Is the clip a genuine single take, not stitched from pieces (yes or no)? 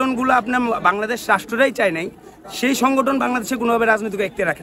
yes